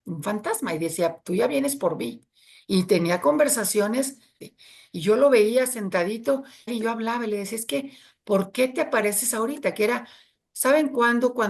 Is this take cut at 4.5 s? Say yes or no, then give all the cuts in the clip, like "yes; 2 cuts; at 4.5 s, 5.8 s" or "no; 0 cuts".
yes; 2 cuts; at 4.5 s, 6.7 s